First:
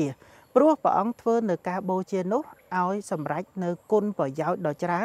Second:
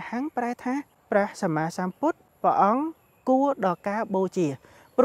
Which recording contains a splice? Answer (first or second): second